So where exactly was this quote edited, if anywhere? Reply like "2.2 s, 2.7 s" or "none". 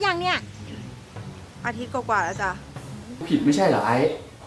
3.2 s